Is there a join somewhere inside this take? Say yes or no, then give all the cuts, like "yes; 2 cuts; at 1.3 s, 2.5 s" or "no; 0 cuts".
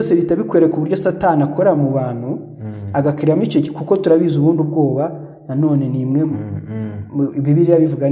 no; 0 cuts